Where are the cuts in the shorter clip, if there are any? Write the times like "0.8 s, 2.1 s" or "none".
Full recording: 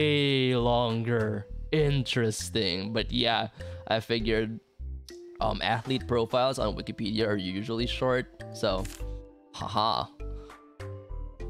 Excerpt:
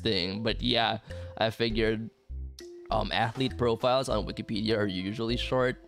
none